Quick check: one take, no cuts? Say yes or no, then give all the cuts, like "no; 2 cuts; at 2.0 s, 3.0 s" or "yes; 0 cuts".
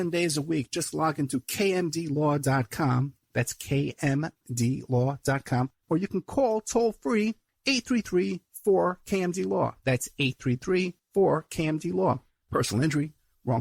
yes; 0 cuts